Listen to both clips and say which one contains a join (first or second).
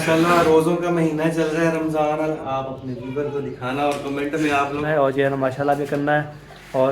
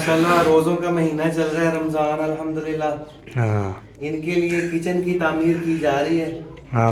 first